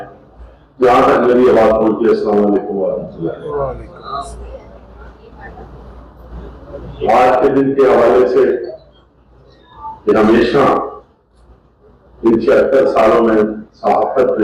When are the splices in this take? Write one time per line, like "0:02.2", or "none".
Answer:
none